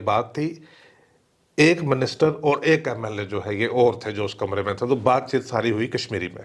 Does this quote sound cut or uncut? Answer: uncut